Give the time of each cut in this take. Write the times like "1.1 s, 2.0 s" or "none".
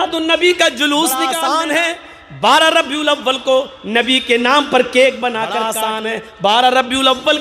1.3 s, 5.7 s